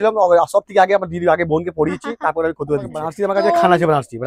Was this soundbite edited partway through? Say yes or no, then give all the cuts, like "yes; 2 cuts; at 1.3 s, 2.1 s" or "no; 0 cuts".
yes; 1 cut; at 3.1 s